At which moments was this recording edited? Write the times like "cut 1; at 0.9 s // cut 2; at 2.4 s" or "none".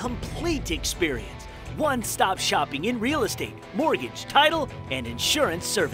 none